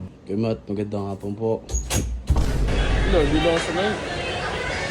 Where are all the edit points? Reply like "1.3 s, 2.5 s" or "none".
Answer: 2.7 s